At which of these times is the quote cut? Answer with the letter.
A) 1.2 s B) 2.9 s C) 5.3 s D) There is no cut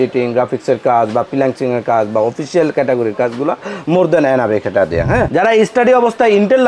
C